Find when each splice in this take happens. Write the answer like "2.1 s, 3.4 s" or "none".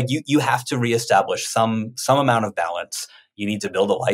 none